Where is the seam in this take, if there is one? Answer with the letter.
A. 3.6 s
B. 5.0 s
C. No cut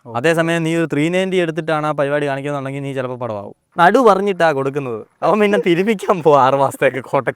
A